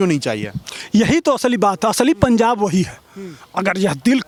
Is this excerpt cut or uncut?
uncut